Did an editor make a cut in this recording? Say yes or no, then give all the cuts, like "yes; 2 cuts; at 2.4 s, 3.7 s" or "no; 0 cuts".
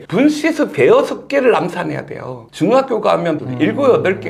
no; 0 cuts